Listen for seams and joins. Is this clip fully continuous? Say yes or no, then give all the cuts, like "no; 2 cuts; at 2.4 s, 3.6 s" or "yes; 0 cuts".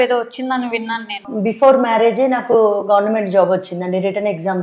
no; 1 cut; at 1.2 s